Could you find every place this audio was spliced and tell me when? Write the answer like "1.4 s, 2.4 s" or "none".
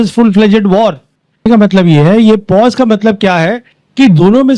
1.5 s